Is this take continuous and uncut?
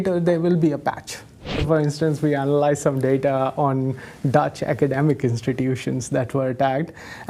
no; 1 cut; at 1.6 s

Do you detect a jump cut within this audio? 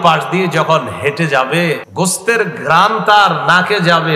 yes; 1 cut; at 1.9 s

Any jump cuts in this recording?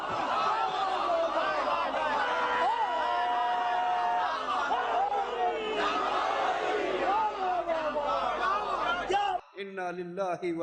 no; 0 cuts

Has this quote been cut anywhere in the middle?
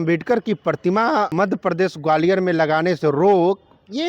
yes; 1 cut; at 1.3 s

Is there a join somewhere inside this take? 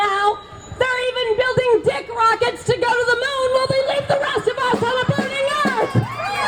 no; 0 cuts

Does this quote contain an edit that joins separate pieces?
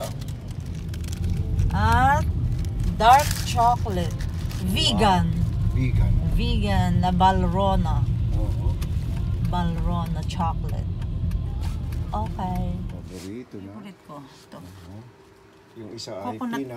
yes; 2 cuts; at 13.0 s, 13.8 s

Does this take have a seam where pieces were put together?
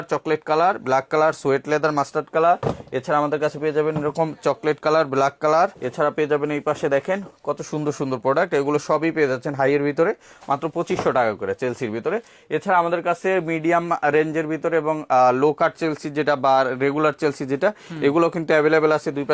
no; 0 cuts

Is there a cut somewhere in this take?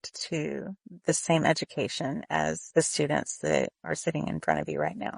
yes; 2 cuts; at 2.6 s, 3.8 s

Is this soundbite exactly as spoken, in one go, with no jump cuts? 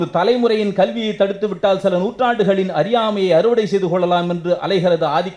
yes; 0 cuts

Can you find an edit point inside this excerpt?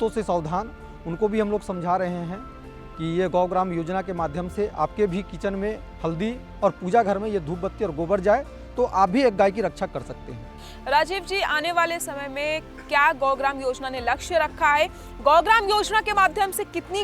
no; 0 cuts

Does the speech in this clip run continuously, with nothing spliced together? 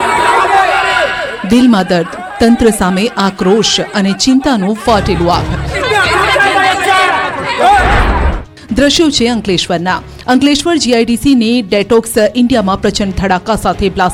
yes; 0 cuts

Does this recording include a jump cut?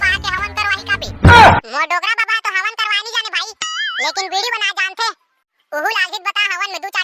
yes; 2 cuts; at 1.1 s, 1.7 s

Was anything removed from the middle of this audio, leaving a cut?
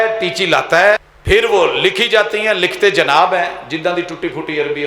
yes; 1 cut; at 1.1 s

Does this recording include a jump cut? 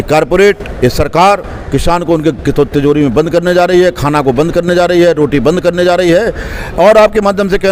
no; 0 cuts

